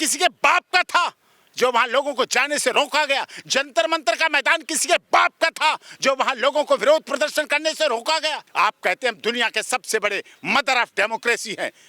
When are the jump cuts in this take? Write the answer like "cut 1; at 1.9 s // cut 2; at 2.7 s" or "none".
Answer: cut 1; at 8.4 s